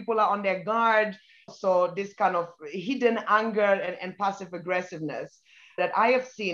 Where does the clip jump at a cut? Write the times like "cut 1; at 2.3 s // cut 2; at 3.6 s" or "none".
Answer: cut 1; at 1.4 s // cut 2; at 5.8 s